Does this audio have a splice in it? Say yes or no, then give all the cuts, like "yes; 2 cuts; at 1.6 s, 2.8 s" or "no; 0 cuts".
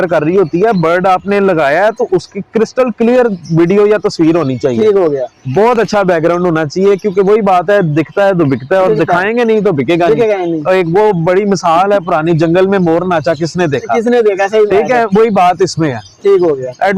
no; 0 cuts